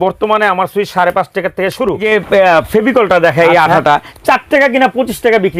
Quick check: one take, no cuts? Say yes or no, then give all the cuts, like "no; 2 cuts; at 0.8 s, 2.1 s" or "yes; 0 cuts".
no; 1 cut; at 2.0 s